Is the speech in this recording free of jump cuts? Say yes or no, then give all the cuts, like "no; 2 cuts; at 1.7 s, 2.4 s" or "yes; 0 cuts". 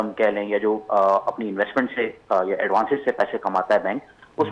yes; 0 cuts